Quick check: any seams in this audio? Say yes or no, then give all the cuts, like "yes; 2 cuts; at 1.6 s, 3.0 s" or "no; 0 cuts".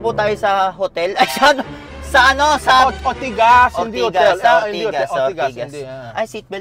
no; 0 cuts